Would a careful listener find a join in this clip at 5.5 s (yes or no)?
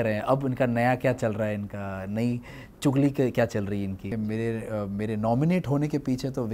no